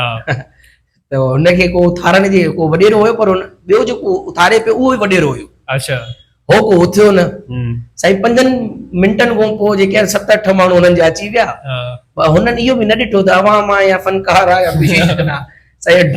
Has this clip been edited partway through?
no; 0 cuts

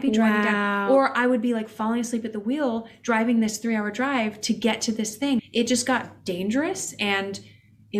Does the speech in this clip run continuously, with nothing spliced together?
yes; 0 cuts

